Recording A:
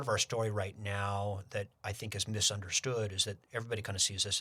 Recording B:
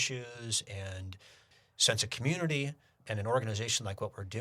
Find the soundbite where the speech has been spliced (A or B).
B